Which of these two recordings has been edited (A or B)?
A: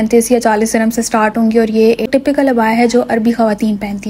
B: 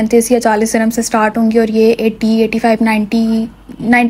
A